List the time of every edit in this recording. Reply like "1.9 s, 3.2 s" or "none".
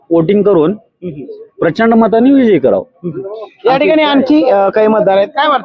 none